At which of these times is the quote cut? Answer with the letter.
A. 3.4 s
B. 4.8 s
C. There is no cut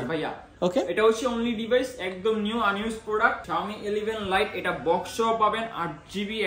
A